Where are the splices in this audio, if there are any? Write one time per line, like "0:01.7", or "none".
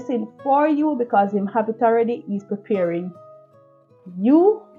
none